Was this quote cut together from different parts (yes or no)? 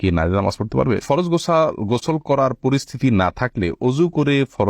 yes